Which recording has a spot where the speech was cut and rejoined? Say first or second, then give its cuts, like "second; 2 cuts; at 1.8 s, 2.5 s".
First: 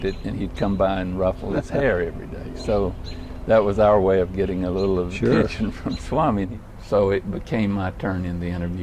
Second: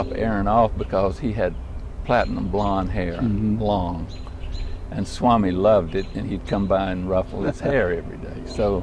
first; 1 cut; at 6.5 s